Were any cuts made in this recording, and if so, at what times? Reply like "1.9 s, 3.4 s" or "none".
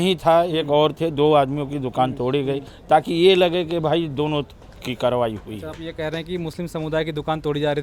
none